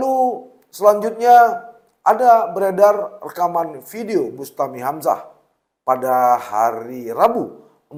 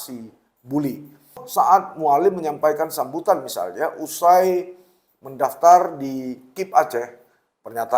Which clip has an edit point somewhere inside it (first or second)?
second